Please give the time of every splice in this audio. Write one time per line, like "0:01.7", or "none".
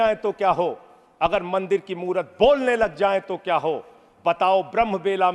none